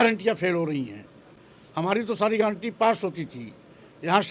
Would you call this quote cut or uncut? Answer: uncut